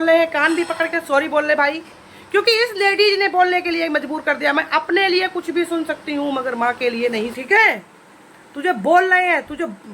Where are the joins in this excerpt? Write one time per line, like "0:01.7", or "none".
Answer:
0:07.3

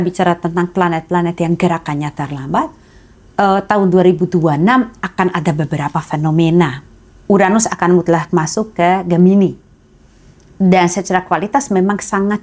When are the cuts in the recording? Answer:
none

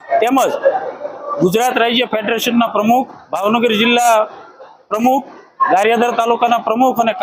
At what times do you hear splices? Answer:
none

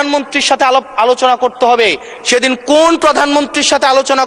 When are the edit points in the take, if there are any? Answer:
none

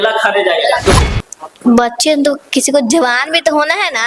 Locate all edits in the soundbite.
0:01.0

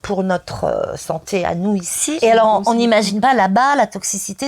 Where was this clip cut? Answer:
0:02.2

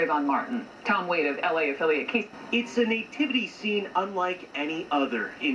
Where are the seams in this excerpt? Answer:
0:02.3

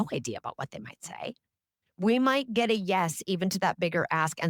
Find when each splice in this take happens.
0:01.7

